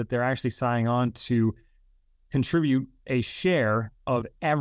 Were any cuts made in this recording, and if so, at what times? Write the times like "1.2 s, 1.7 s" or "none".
none

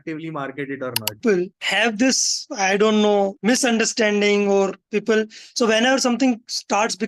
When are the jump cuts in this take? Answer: 1.2 s

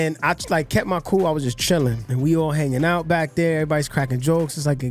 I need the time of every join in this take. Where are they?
2.0 s

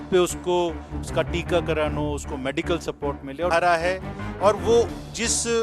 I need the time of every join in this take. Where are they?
3.5 s

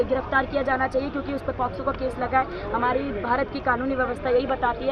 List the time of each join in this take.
none

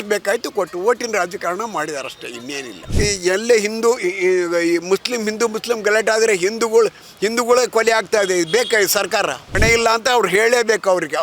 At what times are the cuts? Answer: 2.8 s, 9.6 s

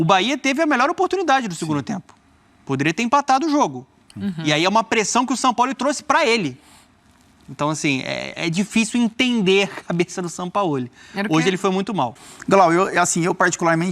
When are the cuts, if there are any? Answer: 12.2 s

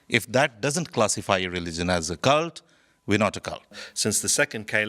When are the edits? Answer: 3.9 s

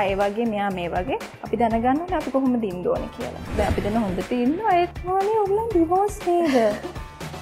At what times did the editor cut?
3.6 s, 4.9 s

